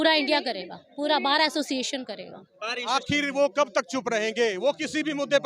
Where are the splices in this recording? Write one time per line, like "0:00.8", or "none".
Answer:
0:02.9